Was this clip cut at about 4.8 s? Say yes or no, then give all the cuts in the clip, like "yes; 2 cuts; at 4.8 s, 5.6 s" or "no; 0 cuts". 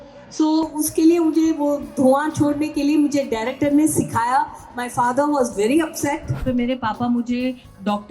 no; 1 cut; at 6.4 s